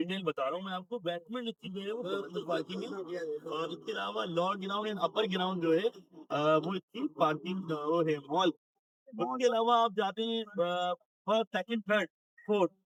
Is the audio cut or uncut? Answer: uncut